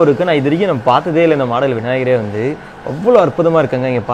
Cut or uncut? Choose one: uncut